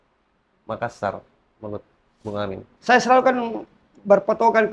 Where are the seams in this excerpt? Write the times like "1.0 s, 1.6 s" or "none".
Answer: 2.7 s